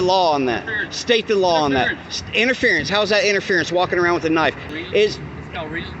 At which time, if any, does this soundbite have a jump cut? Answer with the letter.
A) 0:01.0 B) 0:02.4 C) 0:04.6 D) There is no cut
C